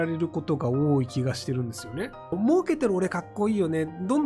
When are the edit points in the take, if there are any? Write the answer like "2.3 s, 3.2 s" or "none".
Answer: 2.3 s